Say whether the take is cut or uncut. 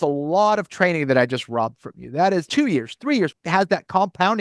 cut